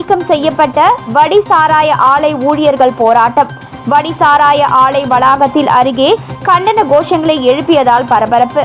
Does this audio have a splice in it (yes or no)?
no